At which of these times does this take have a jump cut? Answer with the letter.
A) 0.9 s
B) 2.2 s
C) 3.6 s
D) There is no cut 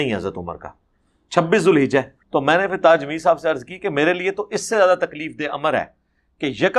B